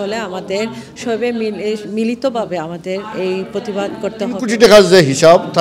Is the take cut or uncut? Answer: cut